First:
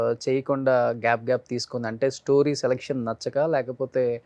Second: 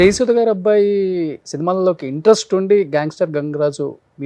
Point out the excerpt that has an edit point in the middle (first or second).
second